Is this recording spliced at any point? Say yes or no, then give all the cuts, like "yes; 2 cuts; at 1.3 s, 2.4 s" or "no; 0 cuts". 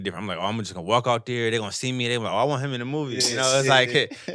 no; 0 cuts